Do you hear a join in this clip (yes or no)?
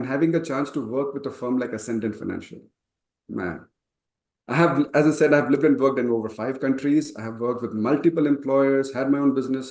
no